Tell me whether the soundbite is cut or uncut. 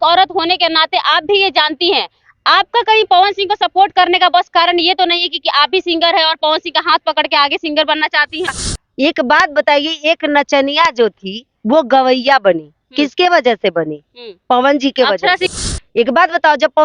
cut